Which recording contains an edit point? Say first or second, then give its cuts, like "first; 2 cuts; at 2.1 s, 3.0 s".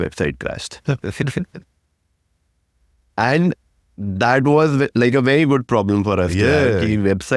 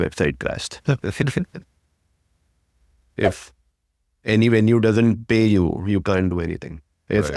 second; 1 cut; at 3.1 s